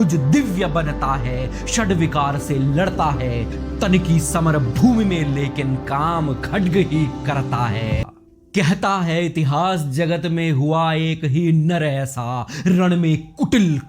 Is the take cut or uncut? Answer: cut